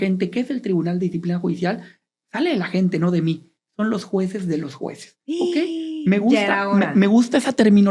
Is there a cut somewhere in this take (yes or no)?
no